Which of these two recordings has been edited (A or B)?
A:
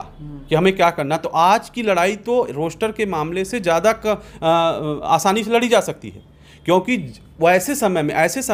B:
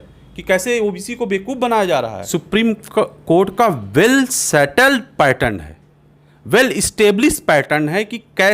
B